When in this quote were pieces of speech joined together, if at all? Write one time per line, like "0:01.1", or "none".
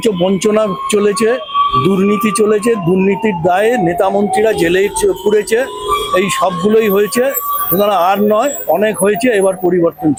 none